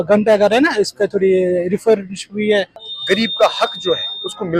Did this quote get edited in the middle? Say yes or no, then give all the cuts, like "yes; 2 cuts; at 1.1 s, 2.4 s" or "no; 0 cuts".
yes; 1 cut; at 2.8 s